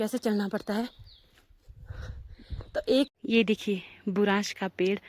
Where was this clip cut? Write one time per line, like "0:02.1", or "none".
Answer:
0:03.2